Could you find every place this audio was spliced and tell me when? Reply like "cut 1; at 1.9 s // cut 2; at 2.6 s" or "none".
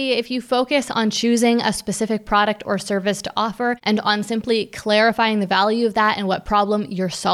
cut 1; at 3.8 s